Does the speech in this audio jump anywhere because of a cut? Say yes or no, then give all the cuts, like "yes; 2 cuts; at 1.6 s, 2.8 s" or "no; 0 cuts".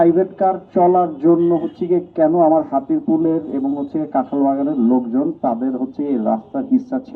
no; 0 cuts